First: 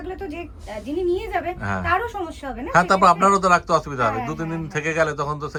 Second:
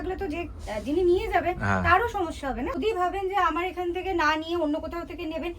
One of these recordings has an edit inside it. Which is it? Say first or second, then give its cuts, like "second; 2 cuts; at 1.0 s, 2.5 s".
second; 1 cut; at 2.7 s